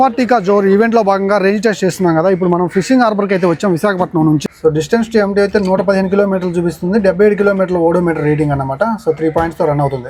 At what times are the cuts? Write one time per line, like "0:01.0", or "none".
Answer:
none